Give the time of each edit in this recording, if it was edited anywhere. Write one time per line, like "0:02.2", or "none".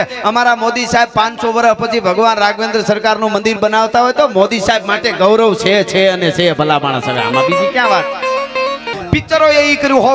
0:08.9